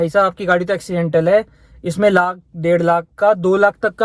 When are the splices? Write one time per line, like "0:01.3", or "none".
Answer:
none